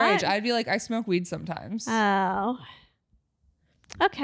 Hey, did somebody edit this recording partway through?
no; 0 cuts

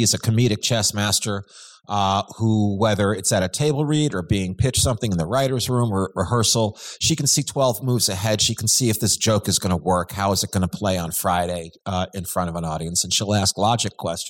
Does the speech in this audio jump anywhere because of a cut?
no; 0 cuts

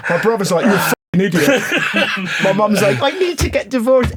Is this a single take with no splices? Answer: yes; 0 cuts

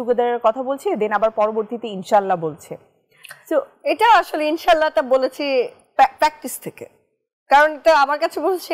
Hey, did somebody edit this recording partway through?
no; 0 cuts

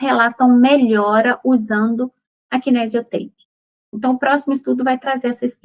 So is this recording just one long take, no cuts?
yes; 0 cuts

